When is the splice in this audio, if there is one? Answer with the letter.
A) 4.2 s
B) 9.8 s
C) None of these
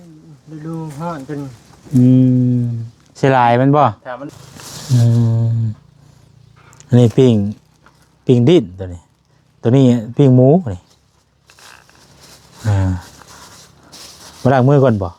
A